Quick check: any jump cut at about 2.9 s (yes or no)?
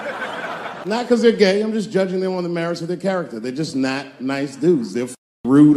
no